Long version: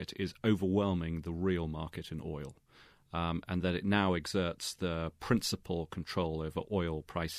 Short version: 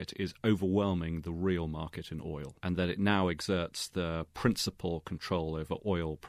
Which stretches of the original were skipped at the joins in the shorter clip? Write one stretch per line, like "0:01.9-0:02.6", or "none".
0:02.6-0:03.4